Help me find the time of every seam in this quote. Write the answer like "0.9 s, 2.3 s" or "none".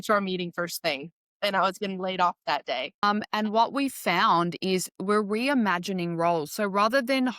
3.3 s